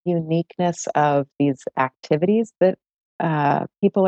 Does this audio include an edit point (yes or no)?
no